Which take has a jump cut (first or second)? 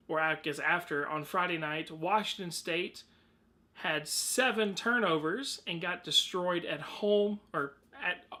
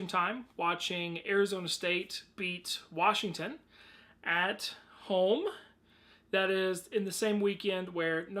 second